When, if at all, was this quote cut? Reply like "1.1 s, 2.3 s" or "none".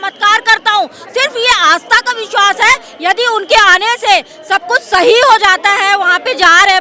none